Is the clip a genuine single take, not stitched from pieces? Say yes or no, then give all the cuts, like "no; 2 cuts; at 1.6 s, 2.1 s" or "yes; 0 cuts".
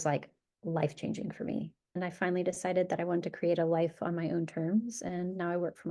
no; 1 cut; at 2.1 s